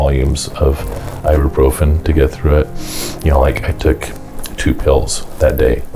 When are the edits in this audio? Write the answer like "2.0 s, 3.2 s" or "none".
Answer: none